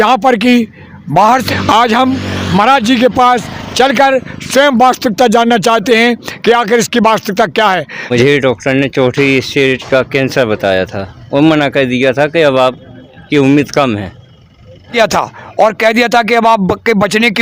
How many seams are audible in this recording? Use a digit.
3